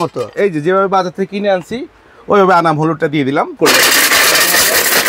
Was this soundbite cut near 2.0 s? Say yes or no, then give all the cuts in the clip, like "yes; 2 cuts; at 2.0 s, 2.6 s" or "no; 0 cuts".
no; 1 cut; at 3.6 s